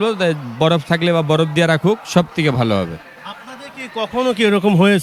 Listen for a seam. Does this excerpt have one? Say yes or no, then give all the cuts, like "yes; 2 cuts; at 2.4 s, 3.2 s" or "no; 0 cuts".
no; 0 cuts